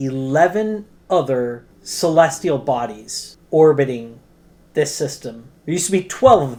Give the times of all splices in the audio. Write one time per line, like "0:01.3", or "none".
none